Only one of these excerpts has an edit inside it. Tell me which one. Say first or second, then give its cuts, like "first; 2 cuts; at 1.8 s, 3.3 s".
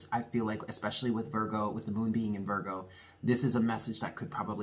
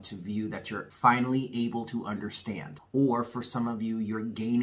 second; 2 cuts; at 0.9 s, 2.7 s